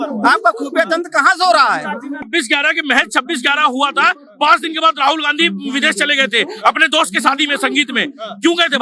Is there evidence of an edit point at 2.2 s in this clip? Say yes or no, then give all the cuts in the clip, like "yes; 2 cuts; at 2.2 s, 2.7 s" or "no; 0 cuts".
yes; 1 cut; at 2.2 s